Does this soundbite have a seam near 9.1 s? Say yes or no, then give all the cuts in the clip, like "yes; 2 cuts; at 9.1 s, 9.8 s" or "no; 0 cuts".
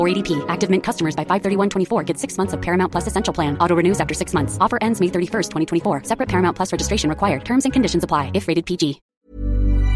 yes; 1 cut; at 9.1 s